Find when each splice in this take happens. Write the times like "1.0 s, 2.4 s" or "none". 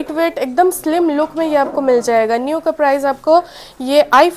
none